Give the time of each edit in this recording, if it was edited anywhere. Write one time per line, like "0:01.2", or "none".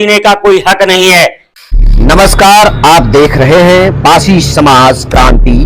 0:01.5